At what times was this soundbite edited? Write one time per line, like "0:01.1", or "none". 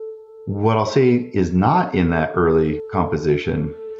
0:02.8